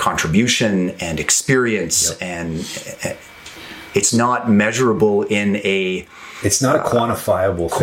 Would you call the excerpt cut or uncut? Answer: uncut